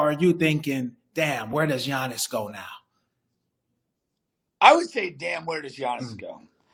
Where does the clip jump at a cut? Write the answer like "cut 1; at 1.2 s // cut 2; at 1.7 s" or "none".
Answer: none